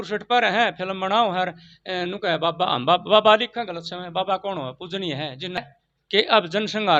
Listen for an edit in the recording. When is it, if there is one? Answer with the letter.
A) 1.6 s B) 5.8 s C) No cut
B